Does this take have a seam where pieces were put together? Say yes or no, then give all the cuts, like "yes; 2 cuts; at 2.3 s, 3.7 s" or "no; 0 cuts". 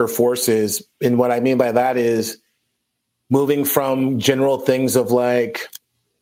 no; 0 cuts